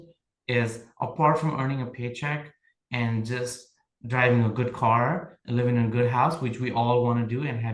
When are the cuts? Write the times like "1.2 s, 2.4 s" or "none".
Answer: none